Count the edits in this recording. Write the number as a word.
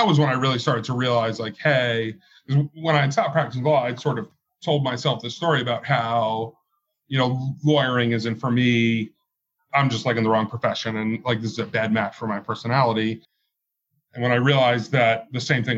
zero